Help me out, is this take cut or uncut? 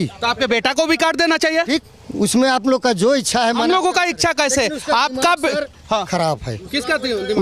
uncut